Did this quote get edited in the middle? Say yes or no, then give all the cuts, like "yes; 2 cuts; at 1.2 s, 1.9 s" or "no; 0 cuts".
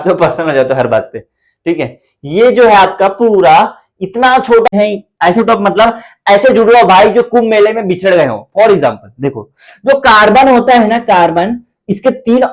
yes; 1 cut; at 4.7 s